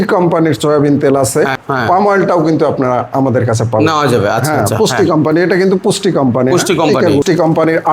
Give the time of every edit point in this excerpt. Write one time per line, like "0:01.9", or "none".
0:01.6
0:07.2